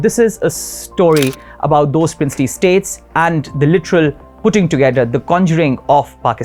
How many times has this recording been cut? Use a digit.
0